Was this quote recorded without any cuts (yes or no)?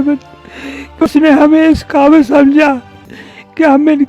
no